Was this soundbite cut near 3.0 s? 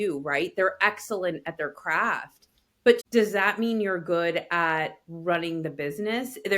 yes; 1 cut; at 3.0 s

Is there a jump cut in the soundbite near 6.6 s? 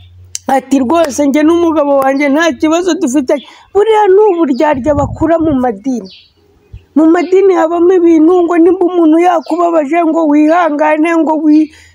no; 0 cuts

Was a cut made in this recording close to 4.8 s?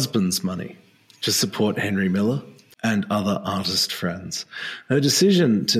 no; 1 cut; at 2.7 s

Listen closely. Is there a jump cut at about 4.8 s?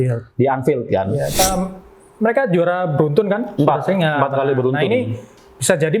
no; 1 cut; at 1.4 s

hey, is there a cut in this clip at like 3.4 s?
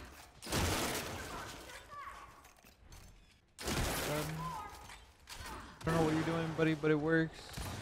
yes; 2 cuts; at 3.4 s, 5.9 s

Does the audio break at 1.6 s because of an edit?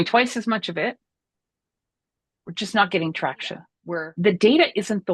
no; 1 cut; at 3.7 s

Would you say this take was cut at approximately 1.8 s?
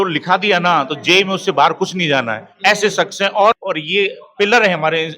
no; 1 cut; at 3.6 s

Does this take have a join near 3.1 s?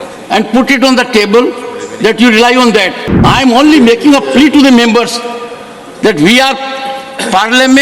yes; 1 cut; at 3.1 s

